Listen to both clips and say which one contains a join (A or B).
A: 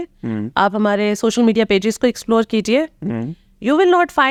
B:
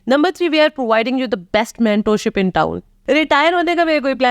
B